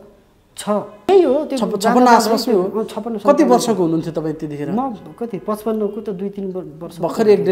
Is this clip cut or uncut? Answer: cut